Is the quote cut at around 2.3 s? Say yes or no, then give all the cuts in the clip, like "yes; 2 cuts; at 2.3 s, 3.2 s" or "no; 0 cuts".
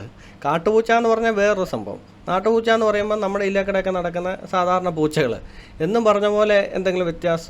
no; 0 cuts